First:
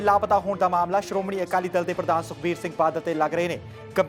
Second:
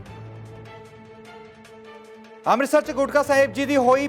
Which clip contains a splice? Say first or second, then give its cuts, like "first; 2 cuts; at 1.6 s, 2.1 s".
second; 1 cut; at 2.1 s